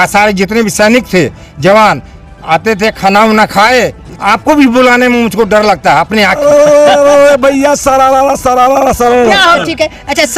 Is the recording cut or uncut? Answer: cut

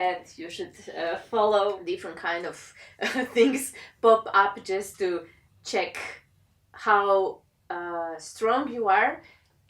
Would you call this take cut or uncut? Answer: cut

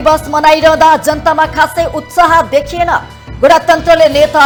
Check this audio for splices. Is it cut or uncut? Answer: uncut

